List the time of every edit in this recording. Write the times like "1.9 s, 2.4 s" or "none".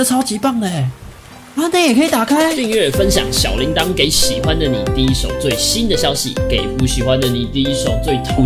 2.6 s